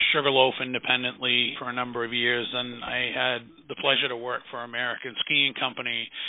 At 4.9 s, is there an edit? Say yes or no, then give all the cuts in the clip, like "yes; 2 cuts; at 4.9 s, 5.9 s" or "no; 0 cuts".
no; 2 cuts; at 1.6 s, 3.6 s